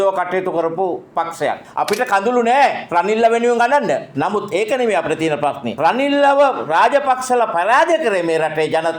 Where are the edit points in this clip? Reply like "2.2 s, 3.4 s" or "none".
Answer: 1.7 s, 4.1 s, 5.7 s